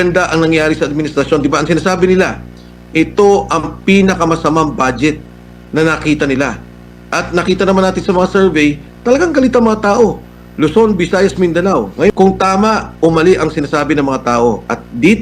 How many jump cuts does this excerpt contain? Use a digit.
1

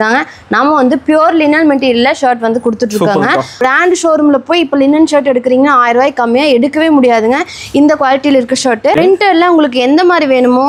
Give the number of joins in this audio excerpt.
2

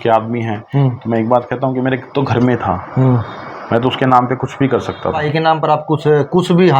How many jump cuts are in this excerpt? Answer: 1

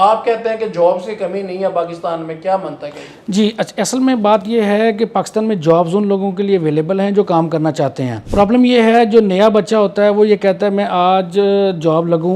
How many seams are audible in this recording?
0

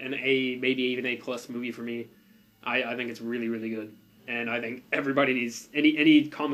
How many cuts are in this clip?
0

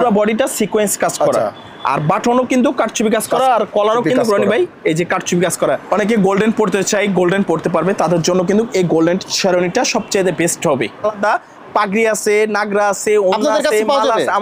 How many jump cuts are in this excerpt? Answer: 2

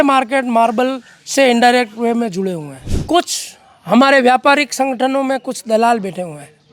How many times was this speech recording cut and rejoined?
1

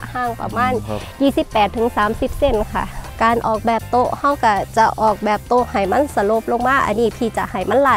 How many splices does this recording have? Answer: 1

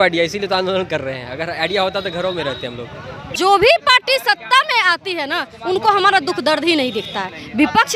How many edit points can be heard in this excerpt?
1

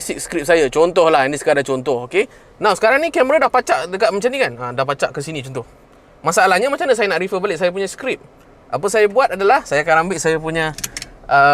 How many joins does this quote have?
0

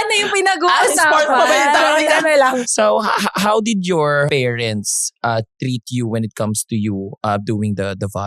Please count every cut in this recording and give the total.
2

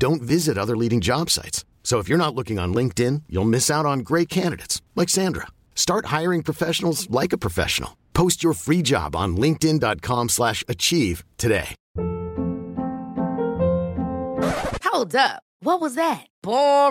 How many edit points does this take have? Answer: 1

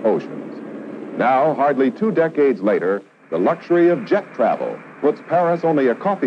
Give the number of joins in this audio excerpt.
1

